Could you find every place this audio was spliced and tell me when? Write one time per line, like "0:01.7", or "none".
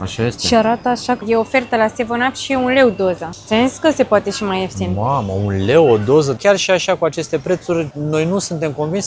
0:01.2
0:03.3
0:06.4
0:08.0